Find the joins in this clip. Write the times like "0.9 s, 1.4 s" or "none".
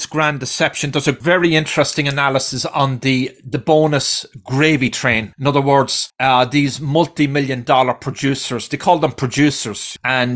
1.2 s, 5.3 s, 6.0 s